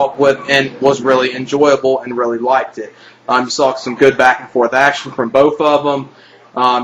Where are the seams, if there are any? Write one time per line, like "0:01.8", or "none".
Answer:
0:03.5